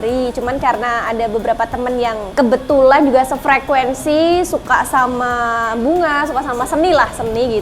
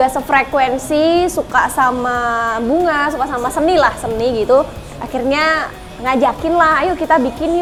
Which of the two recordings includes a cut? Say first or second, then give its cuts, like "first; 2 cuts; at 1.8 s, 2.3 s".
first; 1 cut; at 2.2 s